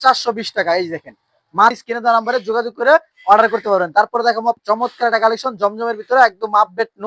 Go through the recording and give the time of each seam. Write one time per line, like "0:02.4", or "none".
0:01.8
0:04.6